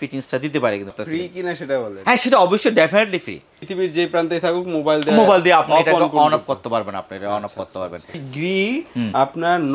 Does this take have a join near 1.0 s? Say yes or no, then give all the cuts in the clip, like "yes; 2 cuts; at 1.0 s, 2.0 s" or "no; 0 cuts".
yes; 3 cuts; at 1.0 s, 3.6 s, 8.2 s